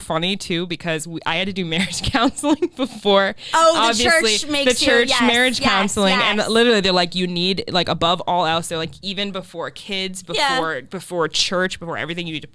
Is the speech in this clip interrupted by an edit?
no; 0 cuts

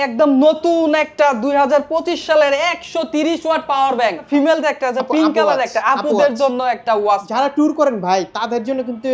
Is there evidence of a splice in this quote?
yes; 2 cuts; at 4.2 s, 7.3 s

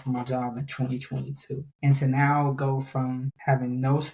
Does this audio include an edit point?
yes; 2 cuts; at 1.7 s, 3.3 s

